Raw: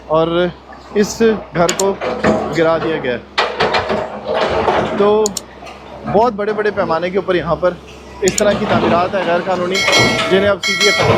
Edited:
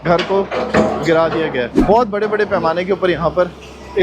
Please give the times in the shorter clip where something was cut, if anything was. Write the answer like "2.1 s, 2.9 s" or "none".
1.7 s